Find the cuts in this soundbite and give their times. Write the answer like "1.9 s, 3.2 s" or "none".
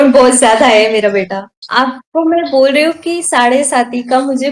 1.5 s